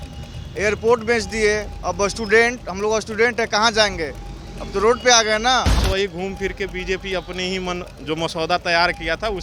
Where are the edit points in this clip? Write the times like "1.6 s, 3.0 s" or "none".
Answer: 5.8 s